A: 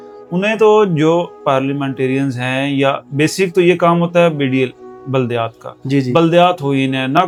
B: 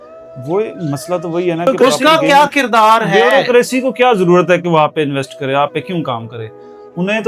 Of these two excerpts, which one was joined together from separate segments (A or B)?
B